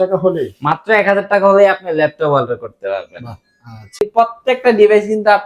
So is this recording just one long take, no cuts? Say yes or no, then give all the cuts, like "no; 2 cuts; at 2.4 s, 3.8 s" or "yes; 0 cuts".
no; 1 cut; at 4.0 s